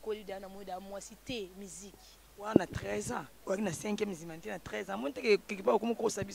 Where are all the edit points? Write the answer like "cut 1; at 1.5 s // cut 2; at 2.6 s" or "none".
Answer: none